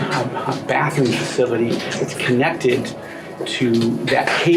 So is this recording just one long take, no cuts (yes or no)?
yes